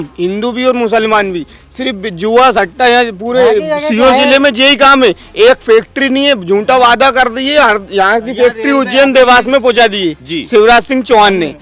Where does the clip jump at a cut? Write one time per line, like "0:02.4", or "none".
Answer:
none